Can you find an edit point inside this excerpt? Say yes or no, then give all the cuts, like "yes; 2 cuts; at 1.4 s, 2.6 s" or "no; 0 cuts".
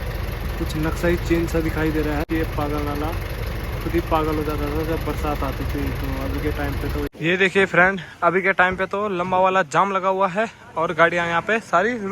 yes; 2 cuts; at 2.3 s, 7.1 s